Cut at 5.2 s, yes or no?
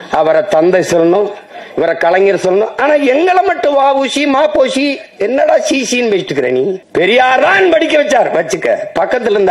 no